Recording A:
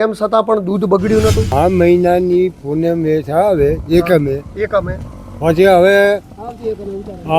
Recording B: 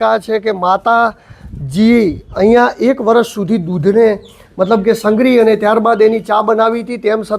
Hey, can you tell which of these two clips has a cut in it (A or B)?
A